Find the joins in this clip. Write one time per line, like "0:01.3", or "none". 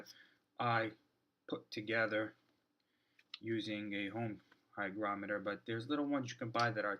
0:06.1